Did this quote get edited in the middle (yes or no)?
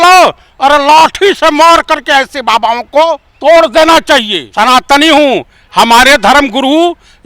yes